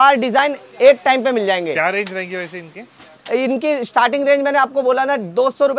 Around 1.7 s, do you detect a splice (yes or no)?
no